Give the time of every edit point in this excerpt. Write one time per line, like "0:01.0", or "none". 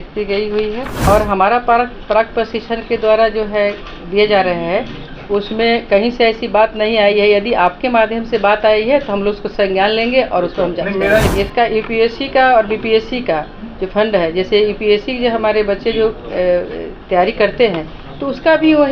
0:01.0
0:11.3